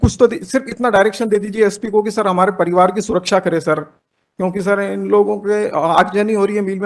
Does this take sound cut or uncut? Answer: uncut